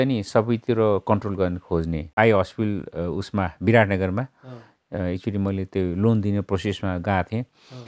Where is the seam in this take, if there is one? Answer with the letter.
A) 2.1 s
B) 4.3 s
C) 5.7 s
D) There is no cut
A